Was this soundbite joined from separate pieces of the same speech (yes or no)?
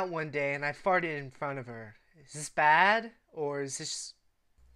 no